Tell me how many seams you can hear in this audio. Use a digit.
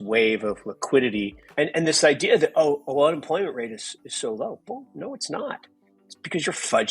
1